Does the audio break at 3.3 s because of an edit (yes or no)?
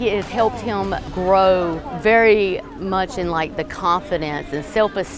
no